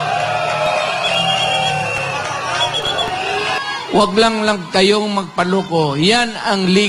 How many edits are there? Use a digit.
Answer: 1